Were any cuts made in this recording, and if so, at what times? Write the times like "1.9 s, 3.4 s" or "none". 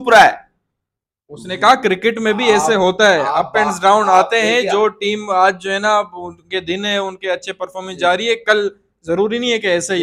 none

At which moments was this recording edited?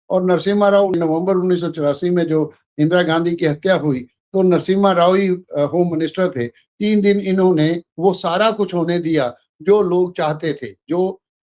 0.9 s

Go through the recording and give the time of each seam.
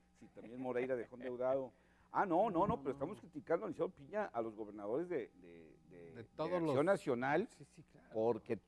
3.3 s

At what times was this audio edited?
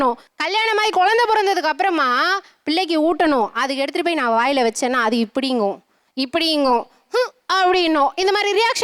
none

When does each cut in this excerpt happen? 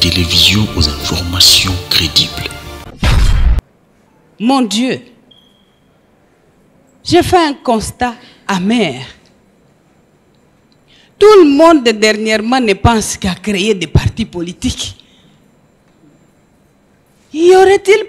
none

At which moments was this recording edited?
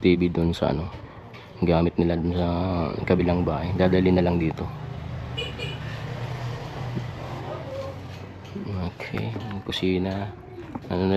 none

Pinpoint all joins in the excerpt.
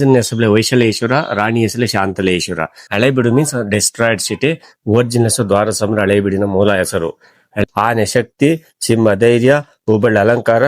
2.8 s, 7.5 s

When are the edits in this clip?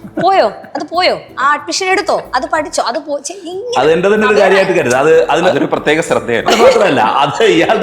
6.5 s

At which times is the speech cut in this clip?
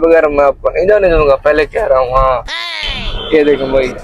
2.6 s

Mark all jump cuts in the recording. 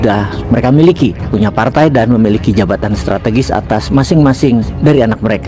none

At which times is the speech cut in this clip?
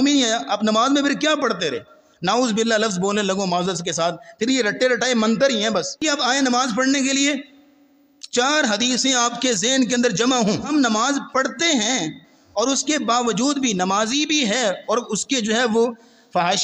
6.0 s, 10.7 s

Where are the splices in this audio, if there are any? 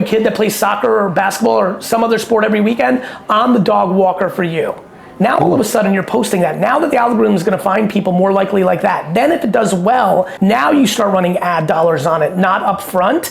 10.3 s

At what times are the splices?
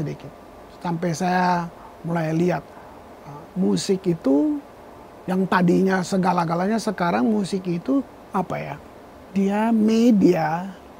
8.2 s

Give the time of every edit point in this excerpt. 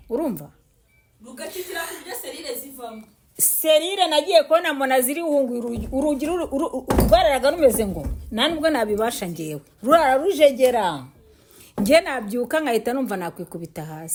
none

